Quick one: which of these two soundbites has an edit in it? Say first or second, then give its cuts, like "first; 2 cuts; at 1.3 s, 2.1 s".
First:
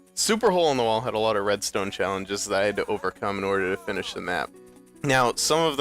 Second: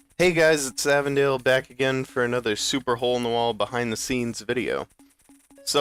first; 1 cut; at 3.3 s